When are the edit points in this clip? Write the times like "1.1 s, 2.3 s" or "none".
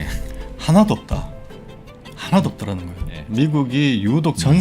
3.2 s